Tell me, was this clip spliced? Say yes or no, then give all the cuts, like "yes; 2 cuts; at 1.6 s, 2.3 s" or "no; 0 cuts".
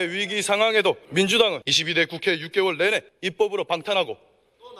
yes; 3 cuts; at 1.0 s, 1.7 s, 3.2 s